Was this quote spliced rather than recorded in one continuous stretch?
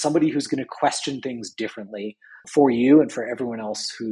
yes; 1 cut; at 2.4 s

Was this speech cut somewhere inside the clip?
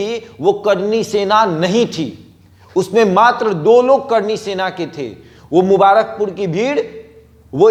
no; 0 cuts

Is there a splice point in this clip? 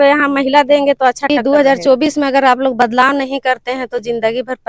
yes; 1 cut; at 1.3 s

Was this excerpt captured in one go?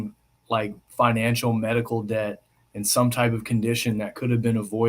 yes; 0 cuts

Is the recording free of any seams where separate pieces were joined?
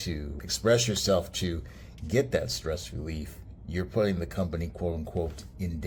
yes; 0 cuts

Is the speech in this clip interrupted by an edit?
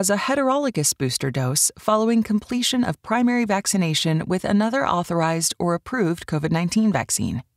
no; 0 cuts

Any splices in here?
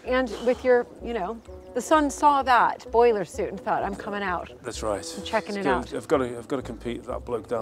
no; 0 cuts

